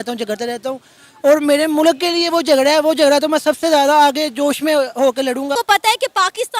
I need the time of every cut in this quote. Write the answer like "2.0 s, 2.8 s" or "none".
5.5 s